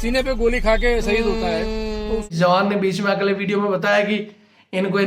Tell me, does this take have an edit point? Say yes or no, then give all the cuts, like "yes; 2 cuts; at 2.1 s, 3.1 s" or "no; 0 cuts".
yes; 1 cut; at 2.3 s